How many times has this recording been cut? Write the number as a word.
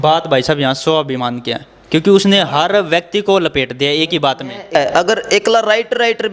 one